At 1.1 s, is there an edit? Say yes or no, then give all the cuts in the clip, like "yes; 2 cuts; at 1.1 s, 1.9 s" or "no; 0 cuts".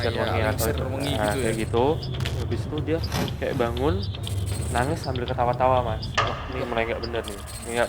no; 1 cut; at 2.4 s